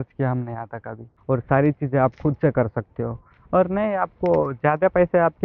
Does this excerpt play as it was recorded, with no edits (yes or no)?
no